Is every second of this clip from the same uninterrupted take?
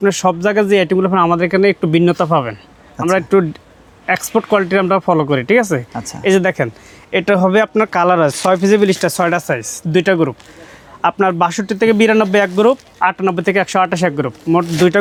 yes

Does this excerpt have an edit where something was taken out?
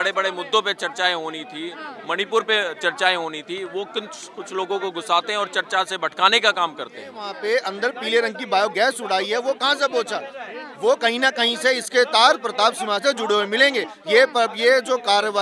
yes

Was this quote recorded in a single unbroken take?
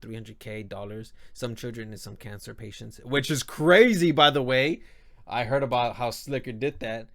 yes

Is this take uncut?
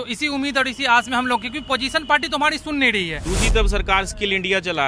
no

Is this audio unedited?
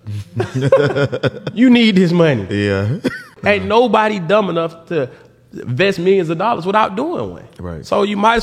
no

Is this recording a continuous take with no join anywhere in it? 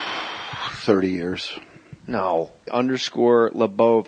yes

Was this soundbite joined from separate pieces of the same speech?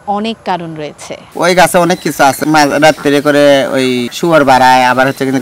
yes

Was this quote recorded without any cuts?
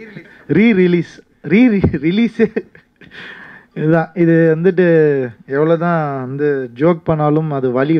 yes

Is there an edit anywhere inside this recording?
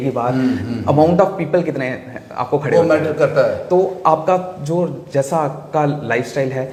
no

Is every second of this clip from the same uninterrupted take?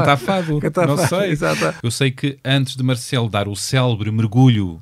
no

